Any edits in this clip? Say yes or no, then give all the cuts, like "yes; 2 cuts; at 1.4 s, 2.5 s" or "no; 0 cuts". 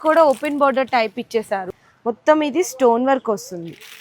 yes; 1 cut; at 1.7 s